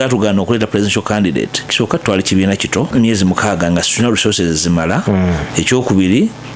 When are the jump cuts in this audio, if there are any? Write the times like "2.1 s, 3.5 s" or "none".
1.7 s, 2.9 s, 5.5 s